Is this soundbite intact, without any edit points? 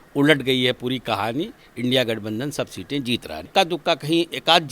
no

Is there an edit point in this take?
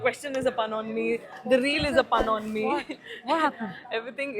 no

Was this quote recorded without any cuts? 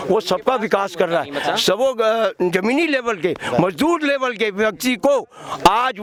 yes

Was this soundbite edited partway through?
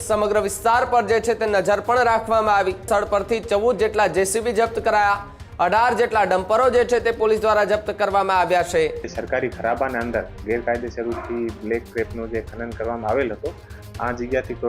yes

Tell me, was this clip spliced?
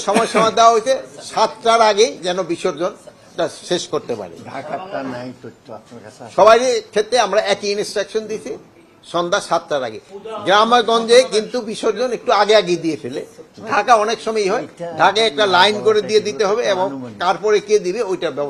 no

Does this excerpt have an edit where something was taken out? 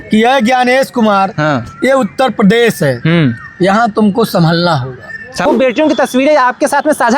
yes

